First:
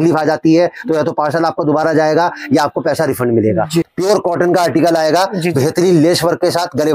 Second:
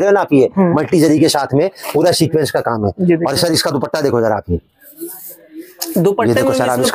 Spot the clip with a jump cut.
first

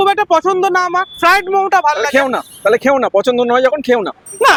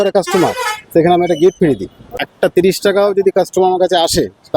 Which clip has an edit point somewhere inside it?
second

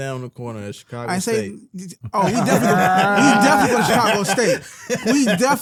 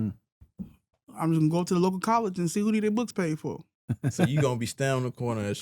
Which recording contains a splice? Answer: second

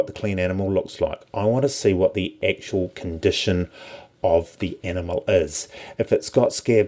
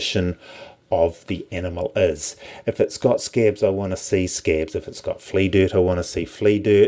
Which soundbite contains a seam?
first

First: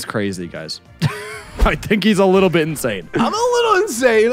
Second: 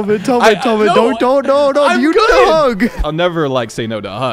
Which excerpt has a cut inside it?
second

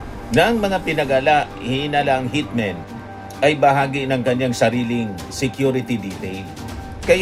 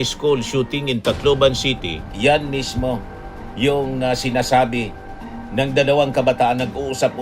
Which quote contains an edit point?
second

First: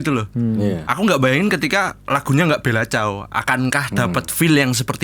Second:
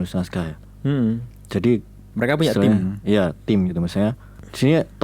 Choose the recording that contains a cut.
second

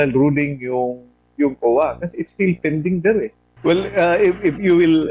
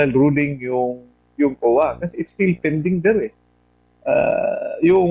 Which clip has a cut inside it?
first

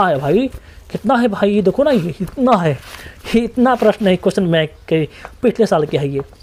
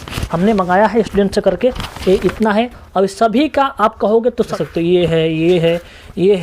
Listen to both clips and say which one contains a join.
second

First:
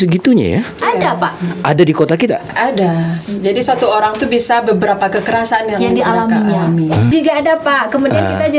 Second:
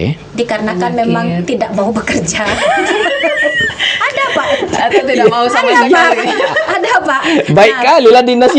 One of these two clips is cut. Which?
first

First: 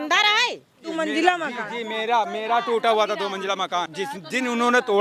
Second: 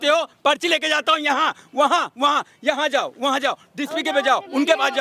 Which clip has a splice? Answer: first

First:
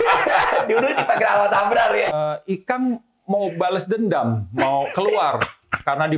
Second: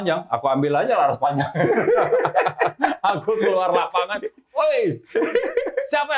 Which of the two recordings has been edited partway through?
first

